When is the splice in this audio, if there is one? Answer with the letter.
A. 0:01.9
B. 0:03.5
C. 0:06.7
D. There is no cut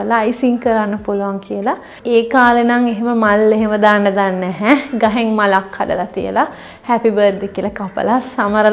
A